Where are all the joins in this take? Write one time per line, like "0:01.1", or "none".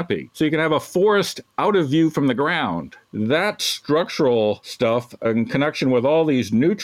0:01.4
0:03.0
0:05.1